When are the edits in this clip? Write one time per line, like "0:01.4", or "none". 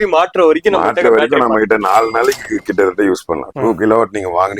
0:03.5